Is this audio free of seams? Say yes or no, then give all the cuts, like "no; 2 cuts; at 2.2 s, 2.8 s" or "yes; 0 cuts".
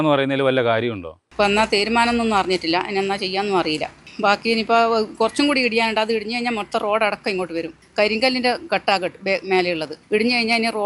no; 3 cuts; at 1.2 s, 7.8 s, 9.9 s